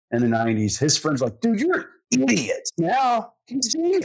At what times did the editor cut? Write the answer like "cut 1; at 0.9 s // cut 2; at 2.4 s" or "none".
cut 1; at 2.7 s